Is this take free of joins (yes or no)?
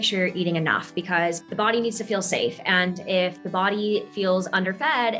no